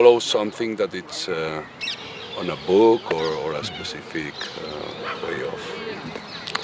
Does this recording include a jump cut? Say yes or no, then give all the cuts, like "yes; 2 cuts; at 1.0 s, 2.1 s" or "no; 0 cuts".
no; 0 cuts